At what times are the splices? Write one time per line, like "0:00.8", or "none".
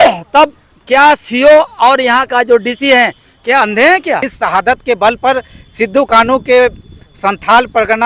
0:04.3